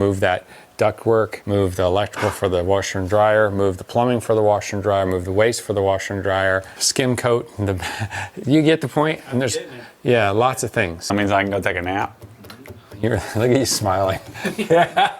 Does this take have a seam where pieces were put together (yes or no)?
yes